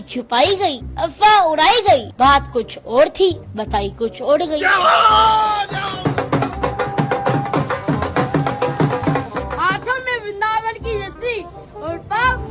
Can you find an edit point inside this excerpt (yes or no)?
yes